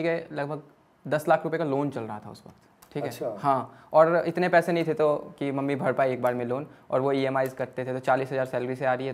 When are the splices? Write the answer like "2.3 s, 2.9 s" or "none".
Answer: none